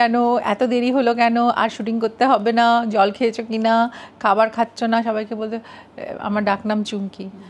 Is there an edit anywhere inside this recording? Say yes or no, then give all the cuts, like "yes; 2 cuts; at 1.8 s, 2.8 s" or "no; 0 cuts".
no; 0 cuts